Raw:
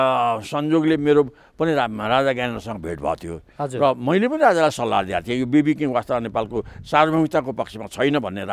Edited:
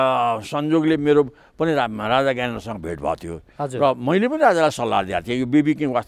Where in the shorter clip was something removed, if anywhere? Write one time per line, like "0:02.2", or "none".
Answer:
none